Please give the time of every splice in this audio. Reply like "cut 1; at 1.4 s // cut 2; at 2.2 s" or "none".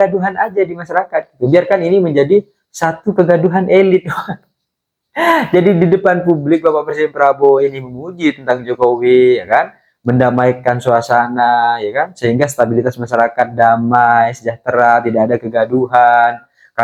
none